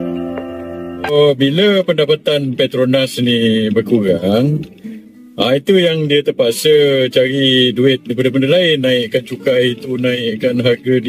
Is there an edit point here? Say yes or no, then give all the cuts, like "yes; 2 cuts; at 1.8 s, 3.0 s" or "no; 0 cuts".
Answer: yes; 1 cut; at 1.1 s